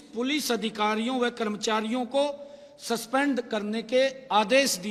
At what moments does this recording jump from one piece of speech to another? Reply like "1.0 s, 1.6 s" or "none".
none